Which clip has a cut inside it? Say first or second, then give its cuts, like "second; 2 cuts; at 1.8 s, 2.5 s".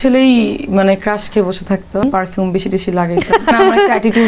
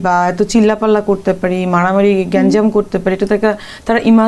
first; 2 cuts; at 2.0 s, 3.5 s